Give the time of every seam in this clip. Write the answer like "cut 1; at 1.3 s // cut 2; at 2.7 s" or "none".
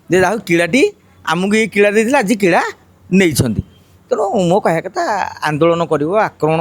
none